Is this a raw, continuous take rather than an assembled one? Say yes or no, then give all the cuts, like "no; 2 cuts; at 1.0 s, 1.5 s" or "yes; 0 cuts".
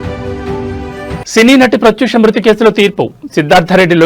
no; 1 cut; at 0.9 s